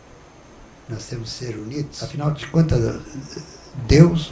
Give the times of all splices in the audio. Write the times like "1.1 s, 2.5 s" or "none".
1.9 s